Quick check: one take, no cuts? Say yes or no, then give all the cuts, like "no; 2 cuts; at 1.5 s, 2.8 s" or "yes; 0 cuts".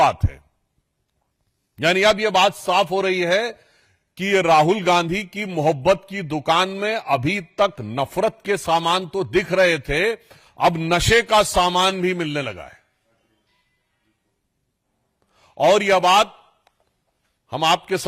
yes; 0 cuts